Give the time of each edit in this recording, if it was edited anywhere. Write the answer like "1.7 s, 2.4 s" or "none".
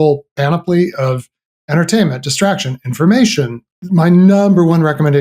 3.6 s